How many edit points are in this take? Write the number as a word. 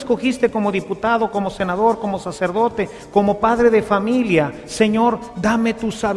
one